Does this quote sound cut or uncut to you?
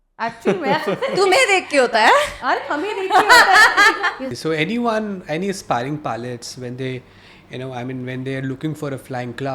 cut